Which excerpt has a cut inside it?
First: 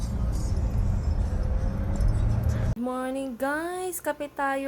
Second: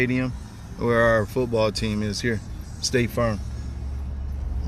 first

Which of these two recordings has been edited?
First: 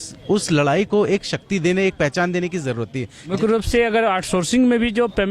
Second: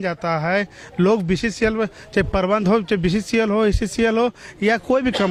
first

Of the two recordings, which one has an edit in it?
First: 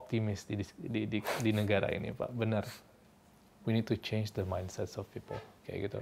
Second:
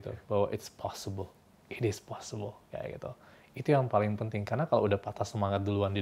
first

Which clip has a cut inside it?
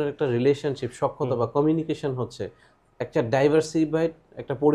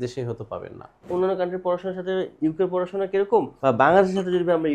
second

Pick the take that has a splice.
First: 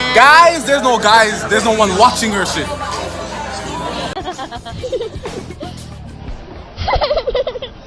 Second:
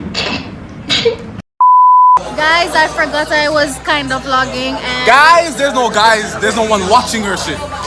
second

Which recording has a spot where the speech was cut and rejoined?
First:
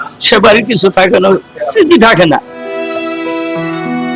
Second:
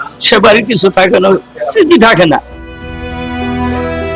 first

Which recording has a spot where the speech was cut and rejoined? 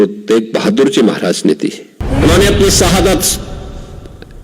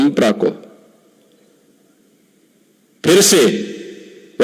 first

